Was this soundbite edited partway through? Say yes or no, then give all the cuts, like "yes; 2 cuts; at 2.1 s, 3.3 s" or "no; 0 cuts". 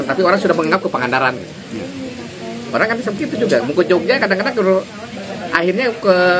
no; 0 cuts